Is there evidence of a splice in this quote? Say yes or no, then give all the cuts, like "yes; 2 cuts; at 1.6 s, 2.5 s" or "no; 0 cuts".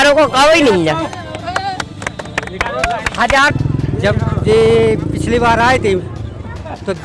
yes; 1 cut; at 3.5 s